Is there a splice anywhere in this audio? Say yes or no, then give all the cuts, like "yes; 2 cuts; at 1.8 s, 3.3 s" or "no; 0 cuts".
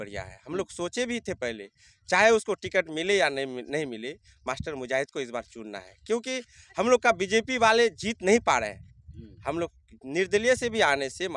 no; 0 cuts